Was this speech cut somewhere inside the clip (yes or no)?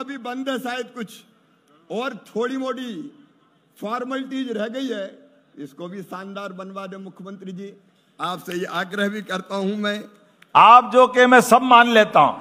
yes